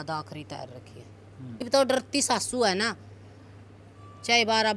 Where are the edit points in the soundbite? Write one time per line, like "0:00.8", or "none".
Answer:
0:01.6